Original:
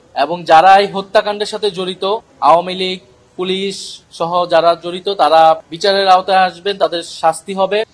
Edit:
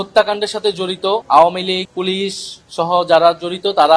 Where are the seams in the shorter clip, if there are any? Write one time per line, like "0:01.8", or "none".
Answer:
0:01.2
0:01.9